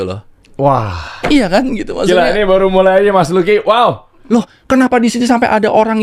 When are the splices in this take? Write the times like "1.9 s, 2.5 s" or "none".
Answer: 4.1 s